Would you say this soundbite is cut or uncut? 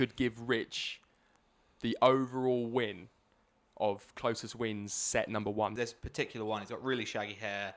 cut